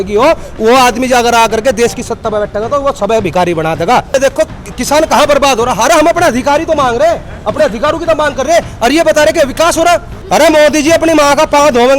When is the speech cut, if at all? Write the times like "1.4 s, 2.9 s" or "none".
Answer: 4.1 s, 10.1 s